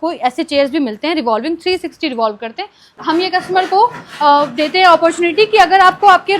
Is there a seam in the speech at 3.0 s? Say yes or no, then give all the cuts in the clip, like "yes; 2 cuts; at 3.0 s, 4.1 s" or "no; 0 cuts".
yes; 1 cut; at 3.0 s